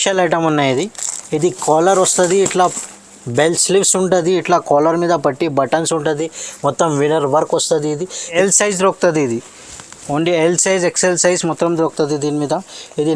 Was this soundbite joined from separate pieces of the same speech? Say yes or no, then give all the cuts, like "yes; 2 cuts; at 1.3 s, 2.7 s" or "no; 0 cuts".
yes; 1 cut; at 8.3 s